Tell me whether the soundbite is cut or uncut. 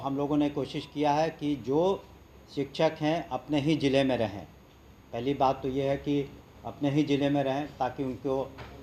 uncut